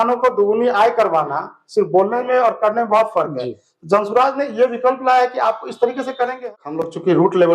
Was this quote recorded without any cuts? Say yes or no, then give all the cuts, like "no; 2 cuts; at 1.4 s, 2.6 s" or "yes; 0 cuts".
no; 1 cut; at 6.4 s